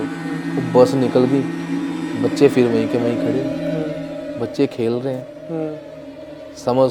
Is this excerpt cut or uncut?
uncut